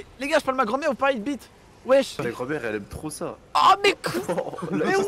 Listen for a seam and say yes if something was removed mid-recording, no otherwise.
yes